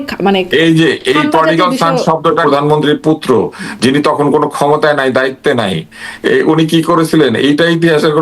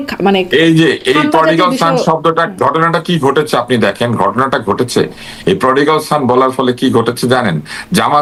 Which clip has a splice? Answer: first; 1 cut; at 2.4 s

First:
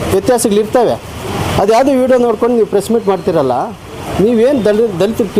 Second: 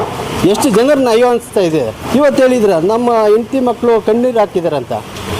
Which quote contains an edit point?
second; 1 cut; at 2.0 s

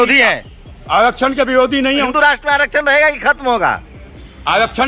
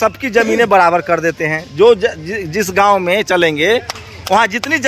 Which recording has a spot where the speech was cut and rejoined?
first; 1 cut; at 2.1 s

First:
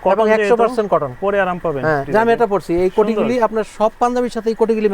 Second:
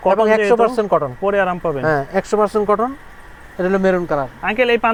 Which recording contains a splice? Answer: first; 1 cut; at 2.0 s

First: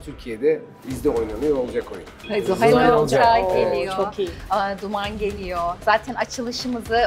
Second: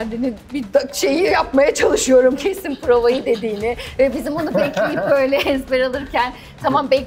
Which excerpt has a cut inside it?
first; 2 cuts; at 0.9 s, 2.2 s

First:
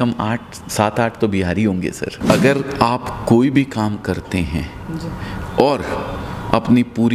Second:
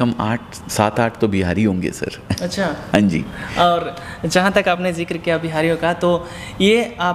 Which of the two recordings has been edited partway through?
first; 1 cut; at 2.1 s

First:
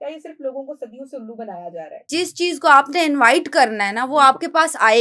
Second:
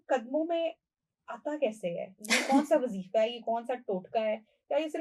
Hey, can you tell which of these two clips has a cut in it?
first; 1 cut; at 2.1 s

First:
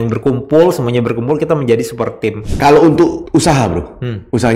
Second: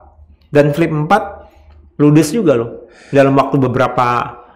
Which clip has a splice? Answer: first; 2 cuts; at 2.5 s, 3.2 s

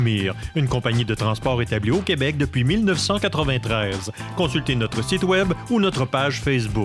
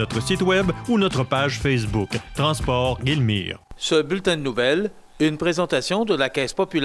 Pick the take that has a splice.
second; 1 cut; at 3.7 s

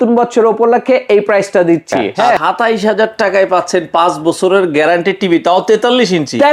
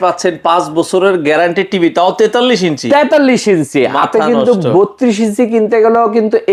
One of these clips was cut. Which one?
first; 1 cut; at 2.1 s

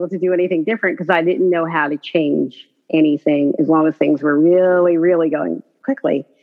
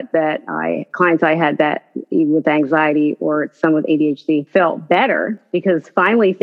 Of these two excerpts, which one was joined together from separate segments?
second; 2 cuts; at 4.5 s, 5.4 s

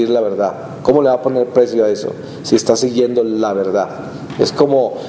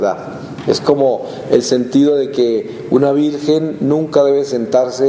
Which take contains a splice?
first; 1 cut; at 1.2 s

